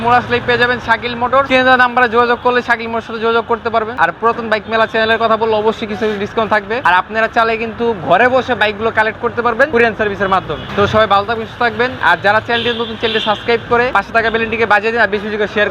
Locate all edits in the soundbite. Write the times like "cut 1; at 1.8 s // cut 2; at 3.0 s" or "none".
cut 1; at 1.5 s // cut 2; at 3.9 s // cut 3; at 6.8 s // cut 4; at 9.7 s // cut 5; at 10.6 s // cut 6; at 11.9 s // cut 7; at 13.9 s